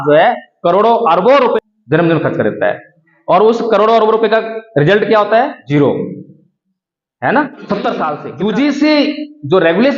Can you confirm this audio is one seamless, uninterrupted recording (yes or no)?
no